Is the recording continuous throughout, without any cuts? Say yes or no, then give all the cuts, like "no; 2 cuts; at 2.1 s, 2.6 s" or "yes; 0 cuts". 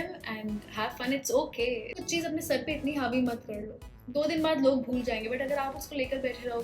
no; 1 cut; at 2.0 s